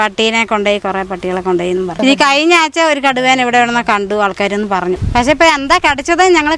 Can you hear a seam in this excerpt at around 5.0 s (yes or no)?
yes